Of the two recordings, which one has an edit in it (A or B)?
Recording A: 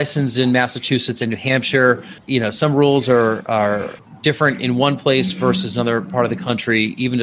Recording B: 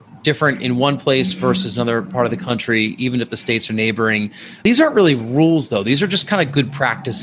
B